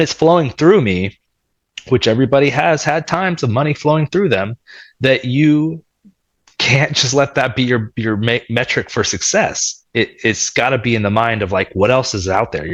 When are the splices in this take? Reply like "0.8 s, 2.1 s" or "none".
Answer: none